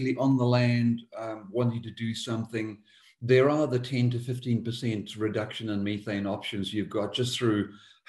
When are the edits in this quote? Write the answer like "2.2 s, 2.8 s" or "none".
none

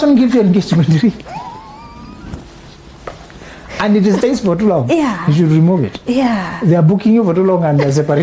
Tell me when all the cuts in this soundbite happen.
none

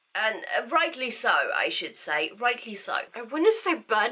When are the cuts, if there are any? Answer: 3.1 s

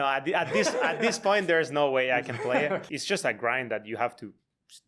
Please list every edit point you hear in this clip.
2.9 s

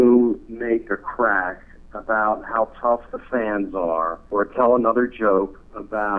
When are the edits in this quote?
4.2 s

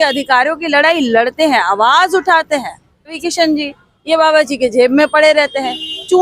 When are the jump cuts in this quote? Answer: 3.2 s

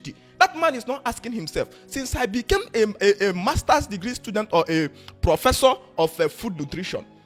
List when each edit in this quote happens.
none

